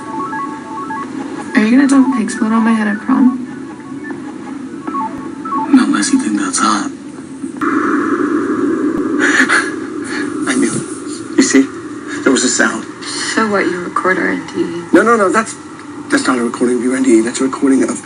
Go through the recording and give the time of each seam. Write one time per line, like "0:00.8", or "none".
0:03.5